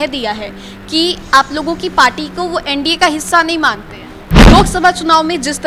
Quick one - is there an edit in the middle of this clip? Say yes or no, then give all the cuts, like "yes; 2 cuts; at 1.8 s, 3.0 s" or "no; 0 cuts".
yes; 1 cut; at 4.5 s